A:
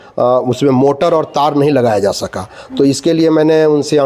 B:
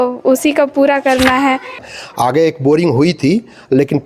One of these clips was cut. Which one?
B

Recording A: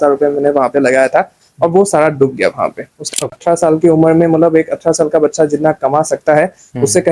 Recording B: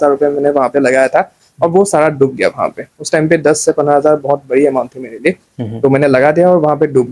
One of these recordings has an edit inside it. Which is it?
A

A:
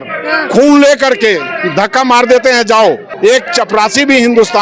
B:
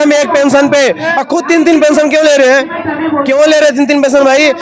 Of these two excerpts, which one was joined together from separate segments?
A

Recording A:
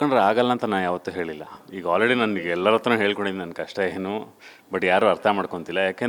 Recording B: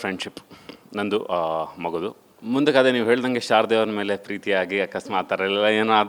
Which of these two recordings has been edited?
B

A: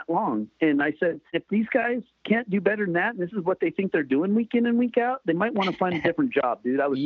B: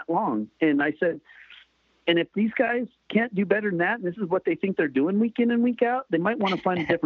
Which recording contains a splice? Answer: A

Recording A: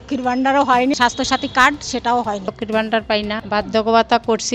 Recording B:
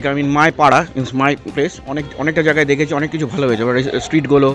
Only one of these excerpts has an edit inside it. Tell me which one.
A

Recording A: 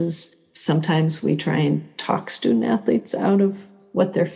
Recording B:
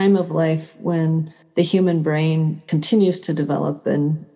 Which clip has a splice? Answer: B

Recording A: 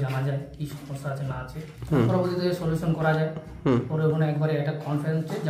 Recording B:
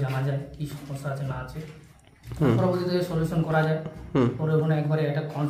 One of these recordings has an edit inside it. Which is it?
A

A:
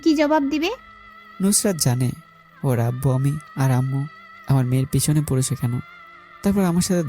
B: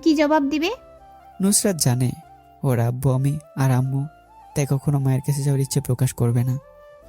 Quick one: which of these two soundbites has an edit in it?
A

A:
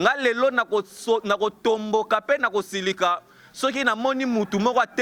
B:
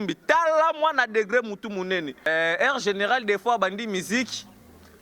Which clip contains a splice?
B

